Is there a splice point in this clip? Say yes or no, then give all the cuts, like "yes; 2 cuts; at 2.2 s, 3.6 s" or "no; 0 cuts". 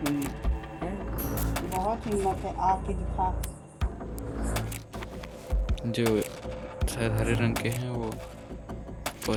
no; 0 cuts